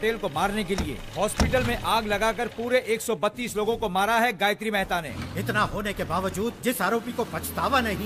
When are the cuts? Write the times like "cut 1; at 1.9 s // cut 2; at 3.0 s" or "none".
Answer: cut 1; at 5.1 s